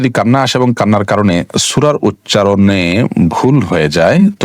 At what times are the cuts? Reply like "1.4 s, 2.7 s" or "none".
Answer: none